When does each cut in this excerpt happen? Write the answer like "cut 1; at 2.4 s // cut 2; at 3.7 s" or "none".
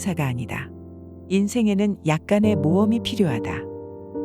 cut 1; at 3.3 s